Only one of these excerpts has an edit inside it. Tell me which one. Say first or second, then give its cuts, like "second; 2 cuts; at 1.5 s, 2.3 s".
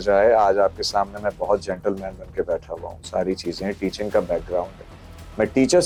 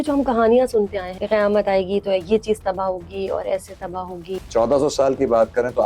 second; 2 cuts; at 1.1 s, 4.4 s